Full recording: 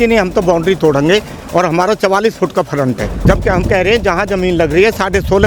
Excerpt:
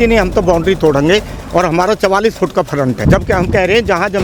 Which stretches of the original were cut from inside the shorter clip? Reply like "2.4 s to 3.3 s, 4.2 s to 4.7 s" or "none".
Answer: 3.0 s to 3.2 s